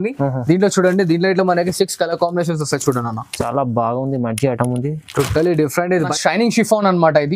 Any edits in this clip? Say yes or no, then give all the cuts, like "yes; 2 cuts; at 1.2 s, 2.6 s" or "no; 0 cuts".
yes; 1 cut; at 6.1 s